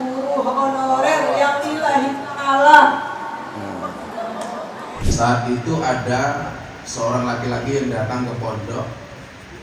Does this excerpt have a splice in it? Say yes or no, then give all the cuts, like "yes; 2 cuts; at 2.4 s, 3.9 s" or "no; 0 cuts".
yes; 1 cut; at 5.0 s